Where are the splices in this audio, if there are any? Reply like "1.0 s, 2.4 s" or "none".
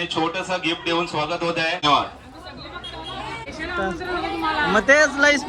1.8 s, 3.5 s